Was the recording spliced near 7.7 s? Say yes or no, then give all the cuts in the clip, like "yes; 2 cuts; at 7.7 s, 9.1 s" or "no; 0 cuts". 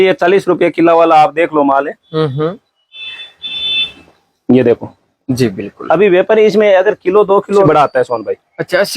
yes; 1 cut; at 7.7 s